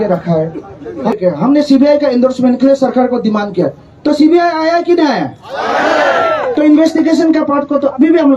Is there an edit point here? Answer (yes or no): yes